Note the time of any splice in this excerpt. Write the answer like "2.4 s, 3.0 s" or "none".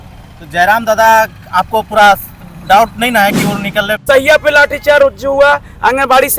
4.0 s

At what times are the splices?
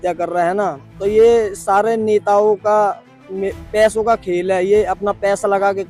none

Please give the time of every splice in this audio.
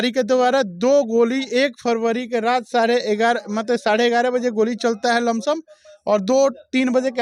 none

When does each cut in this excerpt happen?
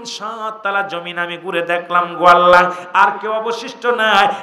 none

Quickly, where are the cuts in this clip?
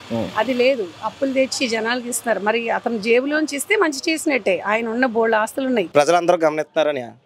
5.9 s

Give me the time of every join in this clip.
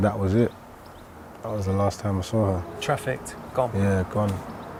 none

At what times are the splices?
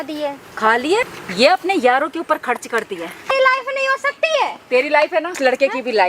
1.1 s, 3.3 s, 5.3 s

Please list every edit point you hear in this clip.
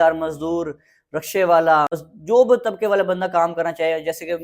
1.9 s

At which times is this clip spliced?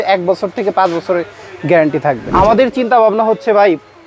2.2 s

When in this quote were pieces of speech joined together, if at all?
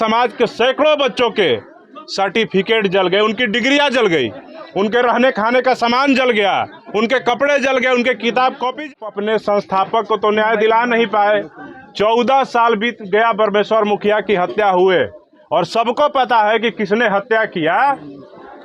8.9 s

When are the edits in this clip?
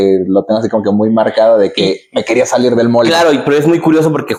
none

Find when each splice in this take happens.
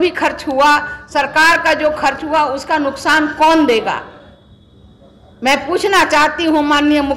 none

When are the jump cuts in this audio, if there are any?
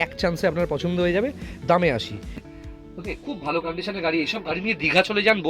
2.5 s

